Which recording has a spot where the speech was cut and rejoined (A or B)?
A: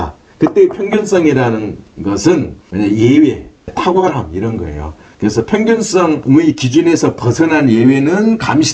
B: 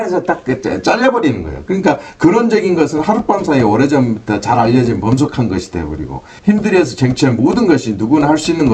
A